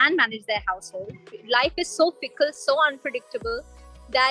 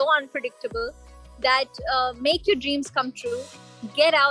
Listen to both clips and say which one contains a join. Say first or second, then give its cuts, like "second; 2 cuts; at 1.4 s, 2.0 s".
first; 1 cut; at 1.3 s